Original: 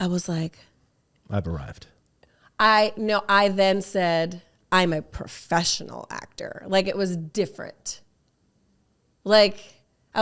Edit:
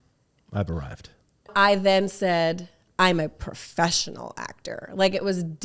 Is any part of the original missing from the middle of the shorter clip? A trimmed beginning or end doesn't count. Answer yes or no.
yes